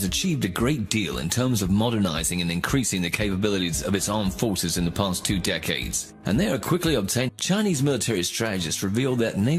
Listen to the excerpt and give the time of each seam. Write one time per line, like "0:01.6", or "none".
none